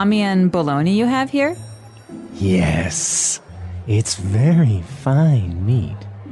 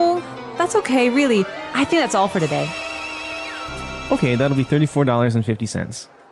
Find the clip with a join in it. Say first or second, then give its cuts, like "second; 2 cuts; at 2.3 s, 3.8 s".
second; 1 cut; at 3.7 s